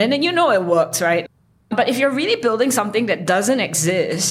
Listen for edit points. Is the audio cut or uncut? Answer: cut